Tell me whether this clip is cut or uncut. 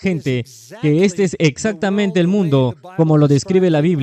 uncut